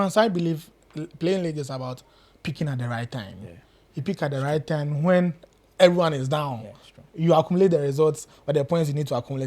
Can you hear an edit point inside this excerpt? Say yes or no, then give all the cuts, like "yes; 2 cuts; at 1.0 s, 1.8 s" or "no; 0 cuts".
no; 0 cuts